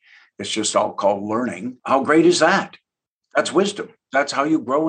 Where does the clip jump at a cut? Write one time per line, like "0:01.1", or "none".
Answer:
0:01.7
0:04.0